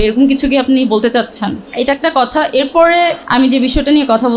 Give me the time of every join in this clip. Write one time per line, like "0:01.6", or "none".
0:01.6
0:03.2